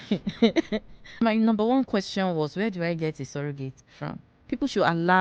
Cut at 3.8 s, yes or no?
yes